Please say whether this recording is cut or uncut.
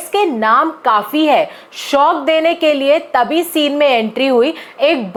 uncut